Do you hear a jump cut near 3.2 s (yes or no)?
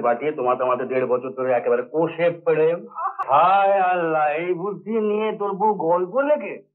yes